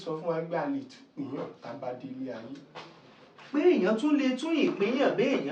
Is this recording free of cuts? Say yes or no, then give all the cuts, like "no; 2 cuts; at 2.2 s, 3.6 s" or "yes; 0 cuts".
yes; 0 cuts